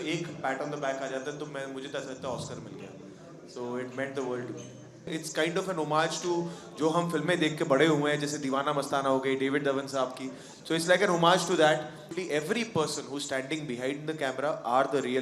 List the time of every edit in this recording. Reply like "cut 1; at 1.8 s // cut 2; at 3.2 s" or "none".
cut 1; at 5.1 s // cut 2; at 12.2 s